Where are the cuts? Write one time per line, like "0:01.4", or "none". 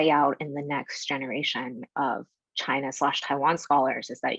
none